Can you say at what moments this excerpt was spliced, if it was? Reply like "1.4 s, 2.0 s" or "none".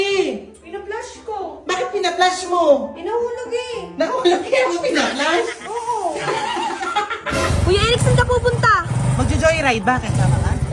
7.5 s